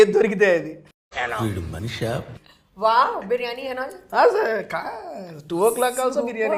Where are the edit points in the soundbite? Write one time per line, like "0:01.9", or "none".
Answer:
none